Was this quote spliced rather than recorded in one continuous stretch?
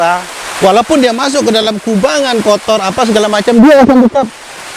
no; 0 cuts

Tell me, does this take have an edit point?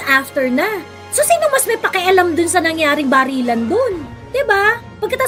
no; 0 cuts

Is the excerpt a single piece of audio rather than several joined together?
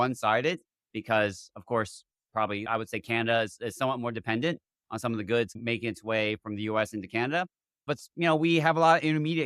no; 3 cuts; at 2.6 s, 5.6 s, 7.9 s

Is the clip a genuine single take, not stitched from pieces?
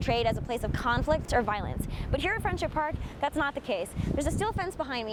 yes; 0 cuts

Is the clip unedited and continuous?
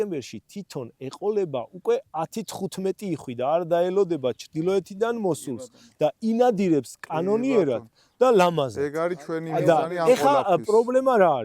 yes; 0 cuts

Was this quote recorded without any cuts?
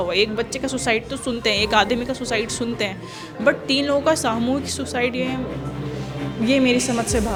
yes; 0 cuts

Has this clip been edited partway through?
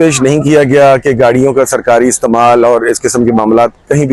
no; 0 cuts

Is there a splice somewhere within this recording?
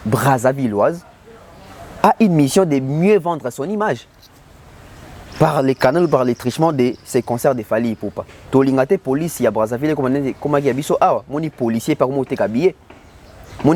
yes; 1 cut; at 8.3 s

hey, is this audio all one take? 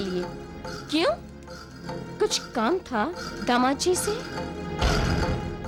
yes; 0 cuts

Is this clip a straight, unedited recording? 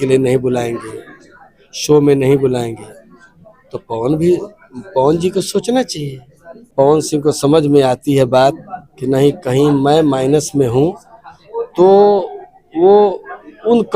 no; 1 cut; at 6.7 s

